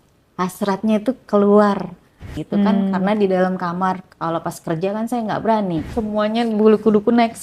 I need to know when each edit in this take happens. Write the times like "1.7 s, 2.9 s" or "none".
2.4 s, 5.9 s